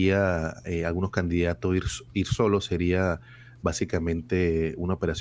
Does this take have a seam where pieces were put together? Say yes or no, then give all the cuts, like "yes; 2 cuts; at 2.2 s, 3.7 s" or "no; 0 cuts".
no; 0 cuts